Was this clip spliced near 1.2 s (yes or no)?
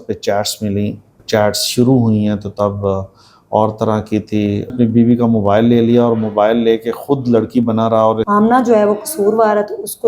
yes